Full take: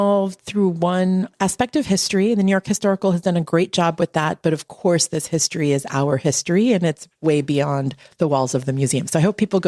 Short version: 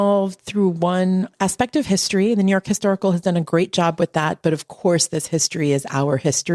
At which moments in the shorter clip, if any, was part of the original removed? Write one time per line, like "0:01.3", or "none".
none